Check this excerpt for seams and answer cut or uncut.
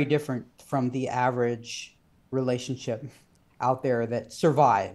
uncut